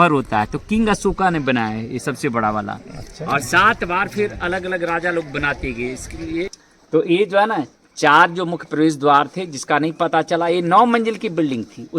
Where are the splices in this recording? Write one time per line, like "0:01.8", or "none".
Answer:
0:06.5